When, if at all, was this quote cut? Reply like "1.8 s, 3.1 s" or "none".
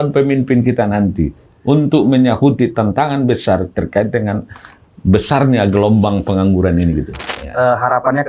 7.4 s